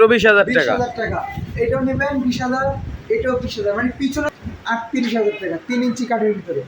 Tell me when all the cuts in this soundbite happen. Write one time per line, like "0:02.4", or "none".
0:04.3